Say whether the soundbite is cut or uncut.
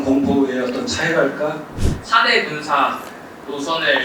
cut